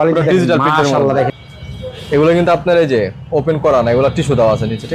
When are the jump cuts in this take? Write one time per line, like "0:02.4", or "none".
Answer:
0:01.3